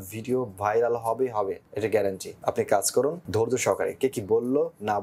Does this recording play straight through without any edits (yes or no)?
no